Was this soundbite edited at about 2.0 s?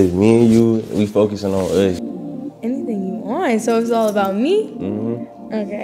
yes; 1 cut; at 2.0 s

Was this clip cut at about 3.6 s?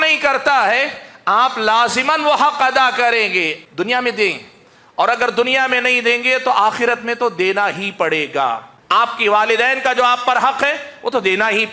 yes; 2 cuts; at 3.6 s, 8.7 s

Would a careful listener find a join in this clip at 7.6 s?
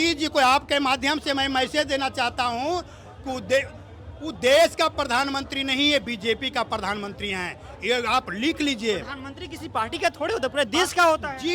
no; 0 cuts

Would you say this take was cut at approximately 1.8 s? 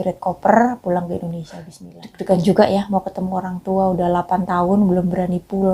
yes; 1 cut; at 1.8 s

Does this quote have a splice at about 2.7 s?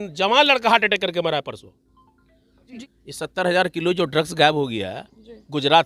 no; 0 cuts

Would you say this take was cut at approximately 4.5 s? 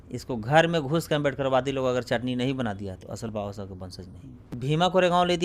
yes; 1 cut; at 4.5 s

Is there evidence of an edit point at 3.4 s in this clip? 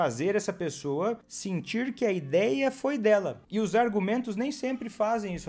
yes; 2 cuts; at 1.3 s, 3.4 s

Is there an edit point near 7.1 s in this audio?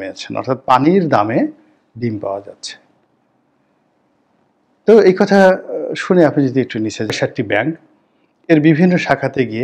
yes; 1 cut; at 7.1 s

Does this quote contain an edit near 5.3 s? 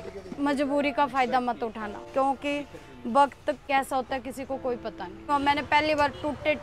yes; 3 cuts; at 2.0 s, 3.6 s, 5.3 s

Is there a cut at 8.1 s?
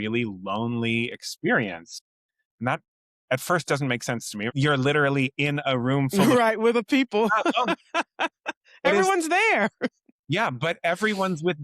no; 1 cut; at 4.5 s

